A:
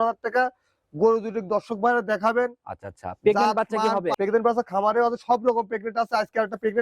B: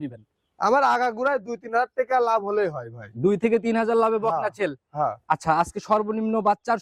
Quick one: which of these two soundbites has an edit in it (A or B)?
A